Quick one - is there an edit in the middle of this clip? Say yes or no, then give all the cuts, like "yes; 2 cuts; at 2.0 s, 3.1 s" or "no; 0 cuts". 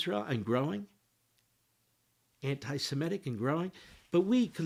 no; 0 cuts